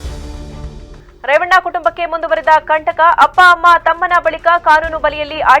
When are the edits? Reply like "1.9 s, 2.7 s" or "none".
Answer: 1.0 s